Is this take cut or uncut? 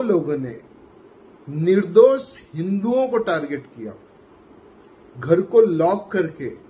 uncut